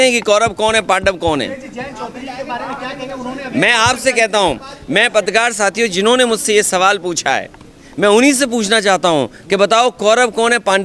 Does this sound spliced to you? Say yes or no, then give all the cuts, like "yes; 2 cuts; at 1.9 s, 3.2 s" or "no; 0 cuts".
no; 0 cuts